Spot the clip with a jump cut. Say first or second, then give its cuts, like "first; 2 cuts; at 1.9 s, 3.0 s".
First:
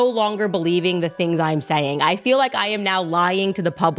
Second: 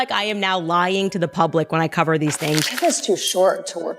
second; 1 cut; at 2.7 s